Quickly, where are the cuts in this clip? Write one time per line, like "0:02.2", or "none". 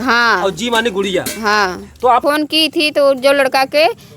0:02.2